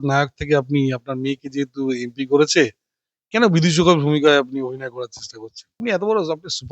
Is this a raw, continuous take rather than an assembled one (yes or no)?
no